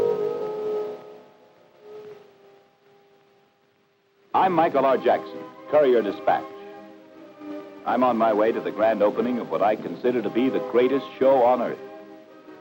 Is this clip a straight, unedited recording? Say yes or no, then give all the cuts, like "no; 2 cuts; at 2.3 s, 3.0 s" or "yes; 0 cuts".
no; 1 cut; at 2.0 s